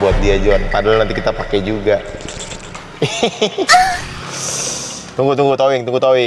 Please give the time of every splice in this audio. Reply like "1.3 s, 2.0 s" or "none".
none